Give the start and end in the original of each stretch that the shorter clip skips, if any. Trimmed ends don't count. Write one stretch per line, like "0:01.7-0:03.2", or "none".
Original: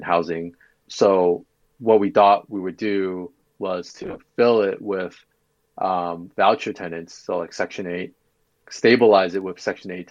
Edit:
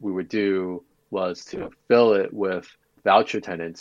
0:05.4-0:06.2